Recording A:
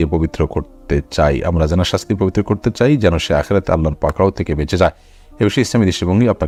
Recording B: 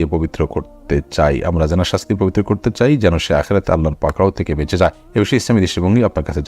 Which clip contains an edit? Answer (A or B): B